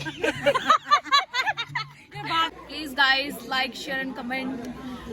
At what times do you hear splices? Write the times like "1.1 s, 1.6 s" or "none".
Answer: 2.5 s